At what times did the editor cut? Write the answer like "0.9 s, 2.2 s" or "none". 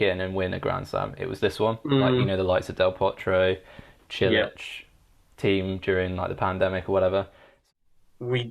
7.5 s